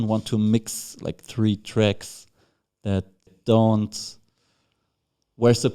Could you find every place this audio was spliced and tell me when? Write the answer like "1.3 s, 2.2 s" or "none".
3.4 s